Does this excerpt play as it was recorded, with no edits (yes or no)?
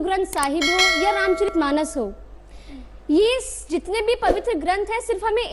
yes